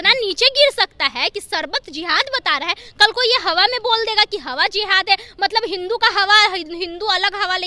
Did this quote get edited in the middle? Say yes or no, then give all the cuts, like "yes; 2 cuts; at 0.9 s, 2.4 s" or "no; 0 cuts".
no; 0 cuts